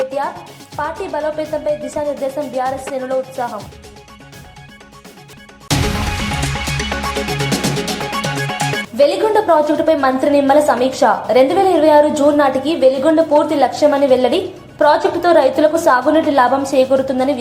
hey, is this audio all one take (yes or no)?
no